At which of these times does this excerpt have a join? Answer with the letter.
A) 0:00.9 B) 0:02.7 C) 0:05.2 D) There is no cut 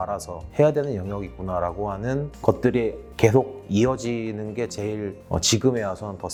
D